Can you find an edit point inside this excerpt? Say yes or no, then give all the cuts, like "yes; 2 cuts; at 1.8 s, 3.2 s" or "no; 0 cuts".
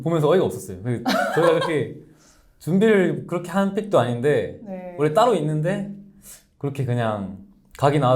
no; 0 cuts